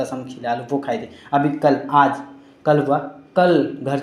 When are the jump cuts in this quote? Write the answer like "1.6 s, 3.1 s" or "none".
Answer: none